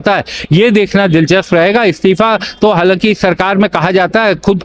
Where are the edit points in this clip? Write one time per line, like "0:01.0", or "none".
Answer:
none